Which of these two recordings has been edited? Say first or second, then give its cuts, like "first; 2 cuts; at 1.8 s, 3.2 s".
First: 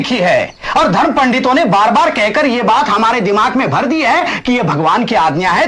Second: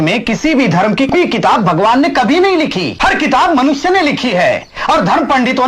second; 2 cuts; at 1.1 s, 2.9 s